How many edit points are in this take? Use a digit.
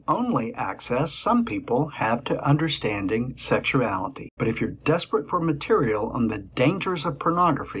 1